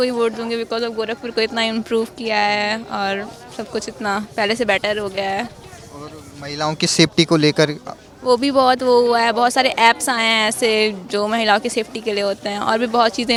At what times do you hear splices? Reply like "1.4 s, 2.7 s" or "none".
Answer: none